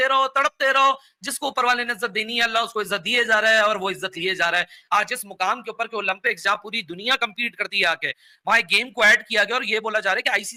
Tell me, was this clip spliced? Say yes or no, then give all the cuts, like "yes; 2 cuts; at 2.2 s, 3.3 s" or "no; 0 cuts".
no; 0 cuts